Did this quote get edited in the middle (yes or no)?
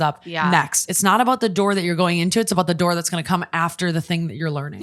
no